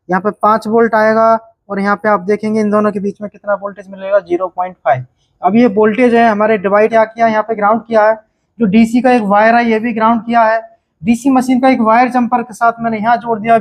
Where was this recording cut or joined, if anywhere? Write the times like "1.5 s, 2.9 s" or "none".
6.9 s